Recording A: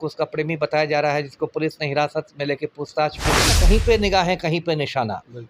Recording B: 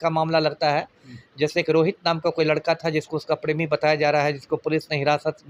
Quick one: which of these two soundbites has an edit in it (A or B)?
A